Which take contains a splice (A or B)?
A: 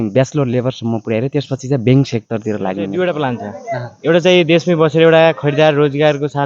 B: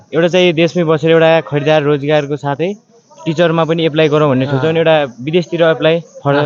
A